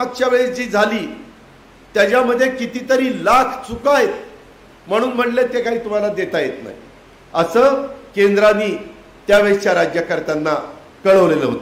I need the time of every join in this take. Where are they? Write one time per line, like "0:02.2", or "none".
none